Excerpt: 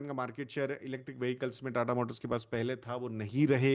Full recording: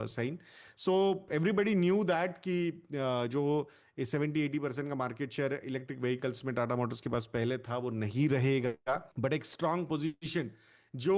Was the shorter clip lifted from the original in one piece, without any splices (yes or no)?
yes